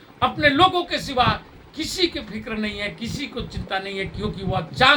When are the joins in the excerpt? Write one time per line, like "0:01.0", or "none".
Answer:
none